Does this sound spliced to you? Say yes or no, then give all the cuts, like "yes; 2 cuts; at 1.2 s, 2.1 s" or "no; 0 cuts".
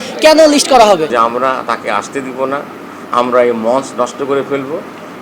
yes; 1 cut; at 1.1 s